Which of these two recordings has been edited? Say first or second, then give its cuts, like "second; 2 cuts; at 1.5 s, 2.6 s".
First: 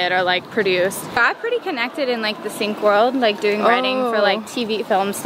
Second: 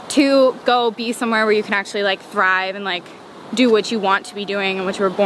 first; 1 cut; at 1.1 s